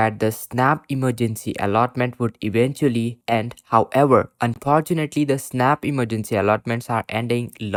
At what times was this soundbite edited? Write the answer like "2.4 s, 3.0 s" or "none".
none